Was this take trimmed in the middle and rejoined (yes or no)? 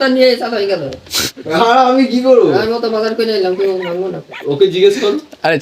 no